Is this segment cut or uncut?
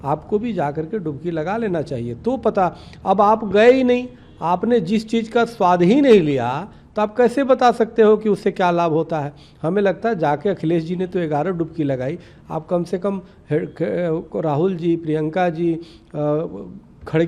uncut